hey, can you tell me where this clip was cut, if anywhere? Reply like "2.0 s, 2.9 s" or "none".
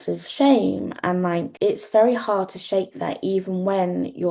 1.5 s